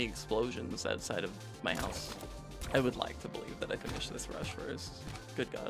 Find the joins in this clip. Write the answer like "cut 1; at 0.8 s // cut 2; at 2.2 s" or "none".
cut 1; at 2.6 s